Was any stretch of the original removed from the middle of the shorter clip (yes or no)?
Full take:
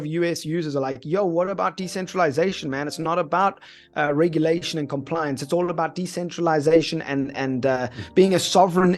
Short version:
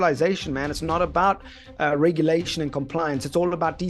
no